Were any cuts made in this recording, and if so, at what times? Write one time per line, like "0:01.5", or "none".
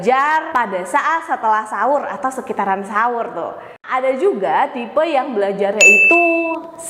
0:03.8